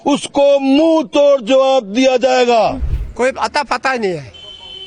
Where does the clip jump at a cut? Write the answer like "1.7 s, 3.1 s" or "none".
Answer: 2.8 s